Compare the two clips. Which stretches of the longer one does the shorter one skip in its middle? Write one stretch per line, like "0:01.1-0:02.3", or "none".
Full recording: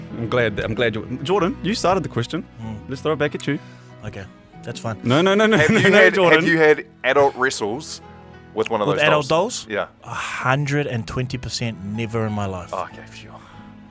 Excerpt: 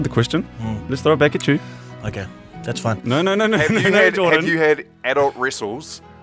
none